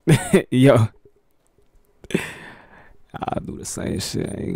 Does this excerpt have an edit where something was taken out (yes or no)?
no